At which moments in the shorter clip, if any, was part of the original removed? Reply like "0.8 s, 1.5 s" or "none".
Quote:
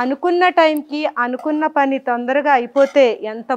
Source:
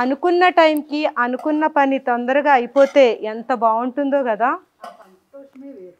none